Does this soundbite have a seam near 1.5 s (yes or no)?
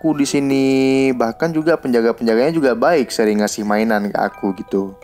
no